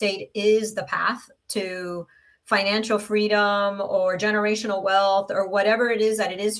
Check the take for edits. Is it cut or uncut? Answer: uncut